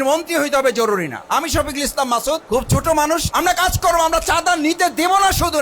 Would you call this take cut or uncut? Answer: cut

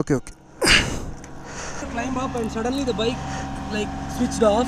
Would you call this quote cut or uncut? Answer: cut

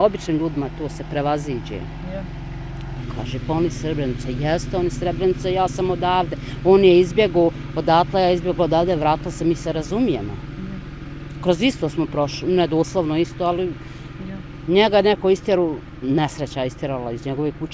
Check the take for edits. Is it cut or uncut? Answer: cut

